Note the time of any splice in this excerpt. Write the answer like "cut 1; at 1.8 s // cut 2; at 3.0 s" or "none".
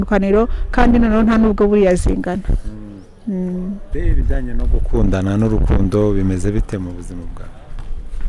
cut 1; at 3.9 s